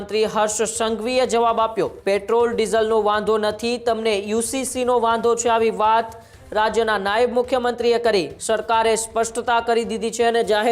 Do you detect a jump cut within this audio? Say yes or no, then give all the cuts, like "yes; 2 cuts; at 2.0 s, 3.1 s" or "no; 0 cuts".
yes; 2 cuts; at 2.0 s, 8.4 s